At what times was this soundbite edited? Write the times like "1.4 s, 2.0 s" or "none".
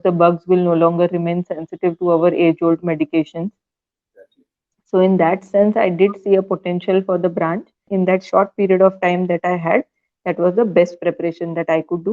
7.9 s